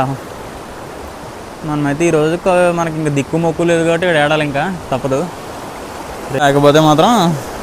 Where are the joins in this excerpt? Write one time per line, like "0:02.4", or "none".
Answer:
0:06.4